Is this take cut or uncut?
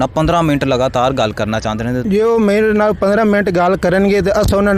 cut